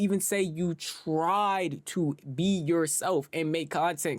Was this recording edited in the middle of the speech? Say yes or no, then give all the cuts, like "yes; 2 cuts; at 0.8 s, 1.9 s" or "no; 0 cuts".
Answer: no; 0 cuts